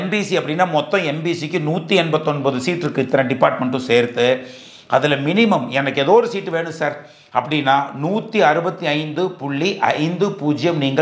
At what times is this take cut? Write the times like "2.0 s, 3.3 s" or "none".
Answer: none